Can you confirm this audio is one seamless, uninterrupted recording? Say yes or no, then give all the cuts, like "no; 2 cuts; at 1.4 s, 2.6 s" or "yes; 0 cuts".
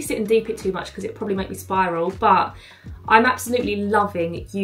yes; 0 cuts